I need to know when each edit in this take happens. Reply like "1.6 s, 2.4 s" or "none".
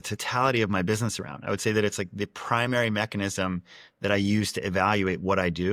none